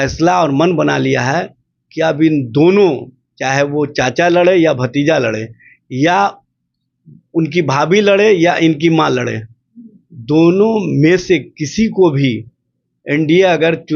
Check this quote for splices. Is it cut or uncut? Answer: uncut